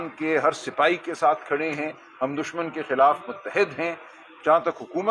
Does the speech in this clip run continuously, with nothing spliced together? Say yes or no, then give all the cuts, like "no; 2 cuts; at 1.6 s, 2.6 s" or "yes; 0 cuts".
yes; 0 cuts